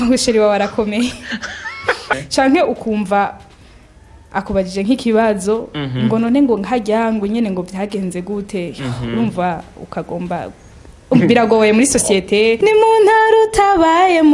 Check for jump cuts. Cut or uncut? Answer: cut